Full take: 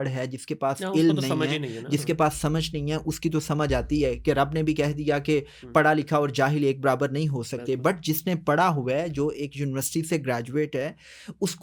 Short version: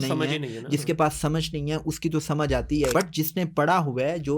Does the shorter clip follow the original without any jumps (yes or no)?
no